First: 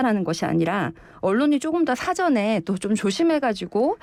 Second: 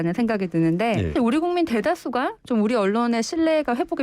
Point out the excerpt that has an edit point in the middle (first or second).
second